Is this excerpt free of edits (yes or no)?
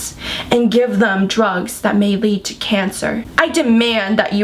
no